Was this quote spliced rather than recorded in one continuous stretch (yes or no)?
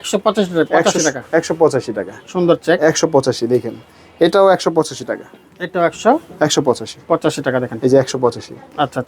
no